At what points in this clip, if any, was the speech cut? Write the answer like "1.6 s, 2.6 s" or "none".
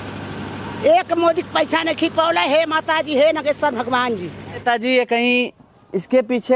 4.5 s